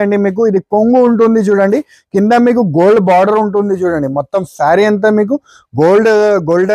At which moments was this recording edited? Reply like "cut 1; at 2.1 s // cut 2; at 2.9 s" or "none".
none